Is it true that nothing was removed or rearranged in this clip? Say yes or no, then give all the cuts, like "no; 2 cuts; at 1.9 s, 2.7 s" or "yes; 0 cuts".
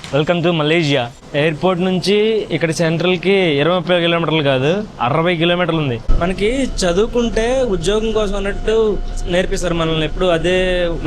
no; 2 cuts; at 1.2 s, 6.1 s